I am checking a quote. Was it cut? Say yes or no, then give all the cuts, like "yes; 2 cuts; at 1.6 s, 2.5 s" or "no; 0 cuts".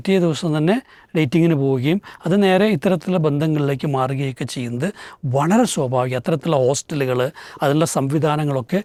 no; 0 cuts